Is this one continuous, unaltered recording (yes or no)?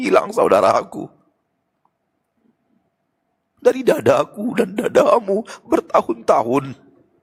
yes